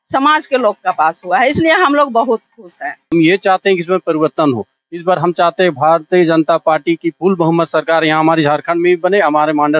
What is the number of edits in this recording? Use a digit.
1